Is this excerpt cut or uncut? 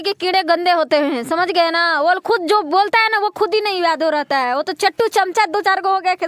uncut